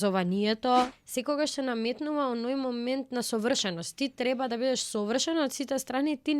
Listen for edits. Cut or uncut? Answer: cut